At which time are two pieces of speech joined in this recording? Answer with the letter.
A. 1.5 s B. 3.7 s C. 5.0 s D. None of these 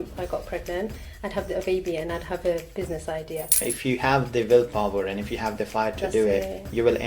B